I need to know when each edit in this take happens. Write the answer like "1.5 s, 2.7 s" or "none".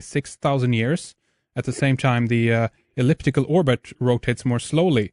none